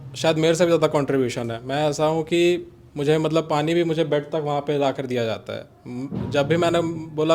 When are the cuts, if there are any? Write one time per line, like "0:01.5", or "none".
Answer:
none